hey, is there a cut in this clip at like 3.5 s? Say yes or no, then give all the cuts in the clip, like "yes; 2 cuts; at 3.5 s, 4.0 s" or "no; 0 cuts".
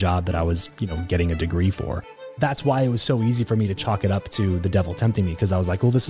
no; 1 cut; at 2.2 s